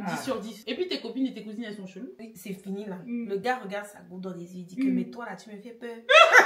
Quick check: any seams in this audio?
yes; 1 cut; at 2.1 s

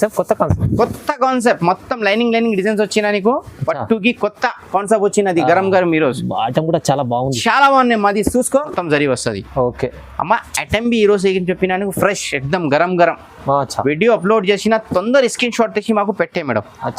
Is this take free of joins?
no; 1 cut; at 8.8 s

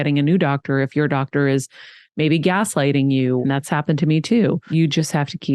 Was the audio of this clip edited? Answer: yes; 2 cuts; at 3.4 s, 4.7 s

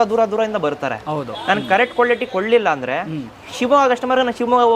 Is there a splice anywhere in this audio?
no; 0 cuts

